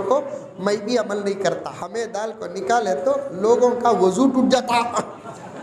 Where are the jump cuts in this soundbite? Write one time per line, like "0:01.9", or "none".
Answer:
0:01.8